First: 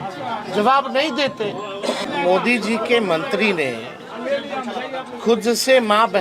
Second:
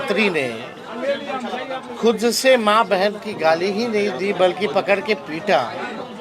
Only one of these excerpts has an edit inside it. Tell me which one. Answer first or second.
first